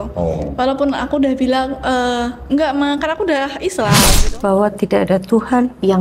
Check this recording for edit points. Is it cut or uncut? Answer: cut